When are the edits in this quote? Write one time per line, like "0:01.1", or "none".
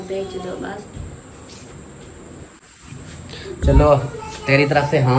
none

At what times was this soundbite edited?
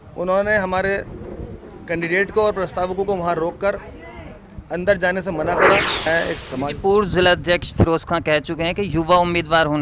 0:06.1

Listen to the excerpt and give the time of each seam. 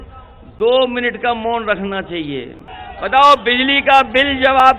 0:02.7

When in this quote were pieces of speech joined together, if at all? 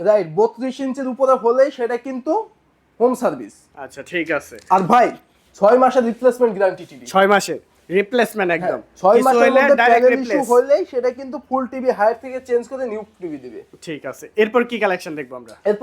none

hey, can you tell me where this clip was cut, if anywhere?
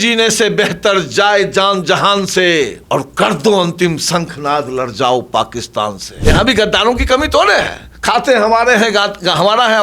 0:02.8
0:06.1

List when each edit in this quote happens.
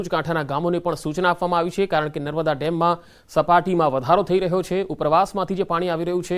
0:01.3

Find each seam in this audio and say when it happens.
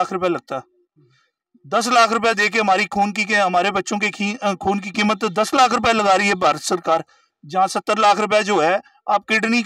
none

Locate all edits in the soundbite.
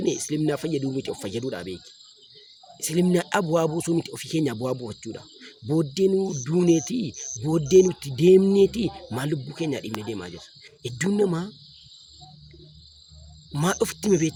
none

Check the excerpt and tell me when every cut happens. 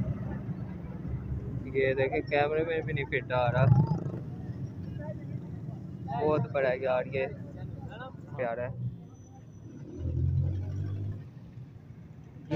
0:04.2
0:08.3
0:11.2

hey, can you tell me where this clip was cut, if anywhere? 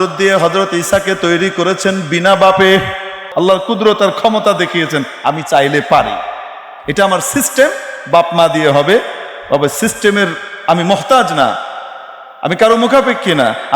0:03.2

